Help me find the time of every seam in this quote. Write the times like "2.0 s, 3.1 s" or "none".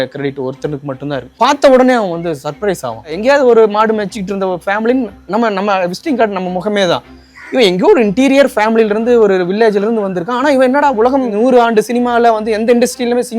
1.3 s, 3.1 s, 11.3 s